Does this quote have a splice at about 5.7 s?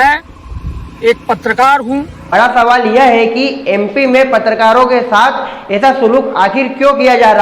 no; 1 cut; at 2.2 s

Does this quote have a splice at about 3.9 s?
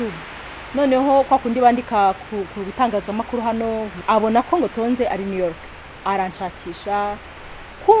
yes; 1 cut; at 3.9 s

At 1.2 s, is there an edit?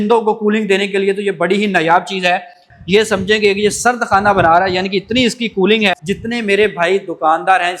no; 2 cuts; at 2.7 s, 5.9 s

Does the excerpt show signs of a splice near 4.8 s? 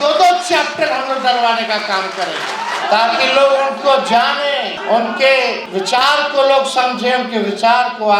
yes; 3 cuts; at 2.8 s, 4.8 s, 5.6 s

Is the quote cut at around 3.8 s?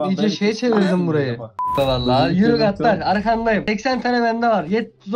no; 1 cut; at 1.6 s

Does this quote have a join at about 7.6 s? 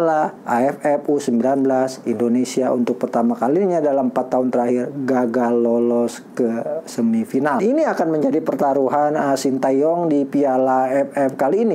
yes; 1 cut; at 7.6 s

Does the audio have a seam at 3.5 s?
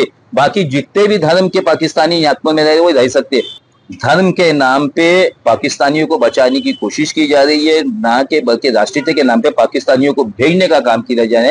yes; 1 cut; at 3.5 s

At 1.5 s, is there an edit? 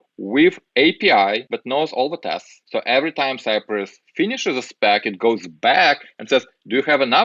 yes; 2 cuts; at 1.5 s, 2.5 s

